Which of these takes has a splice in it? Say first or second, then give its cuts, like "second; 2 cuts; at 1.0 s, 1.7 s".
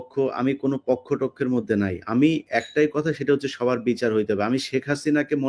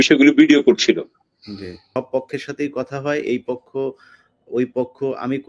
second; 1 cut; at 1.8 s